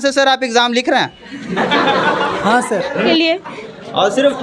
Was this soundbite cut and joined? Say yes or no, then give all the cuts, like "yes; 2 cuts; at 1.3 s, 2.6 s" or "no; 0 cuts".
yes; 1 cut; at 3.1 s